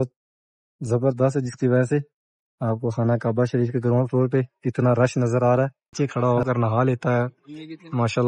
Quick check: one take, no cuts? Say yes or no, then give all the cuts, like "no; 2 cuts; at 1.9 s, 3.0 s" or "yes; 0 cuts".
no; 1 cut; at 5.9 s